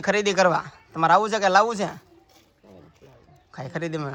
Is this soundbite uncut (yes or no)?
yes